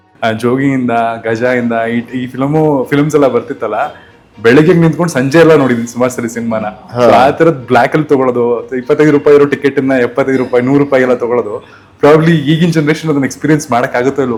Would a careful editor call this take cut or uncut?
uncut